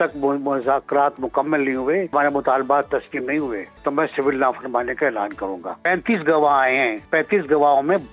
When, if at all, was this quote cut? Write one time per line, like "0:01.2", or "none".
0:02.1
0:03.7
0:05.7
0:07.1